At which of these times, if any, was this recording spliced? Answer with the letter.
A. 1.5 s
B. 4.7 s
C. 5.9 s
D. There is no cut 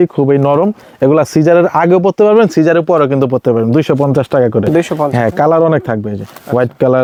D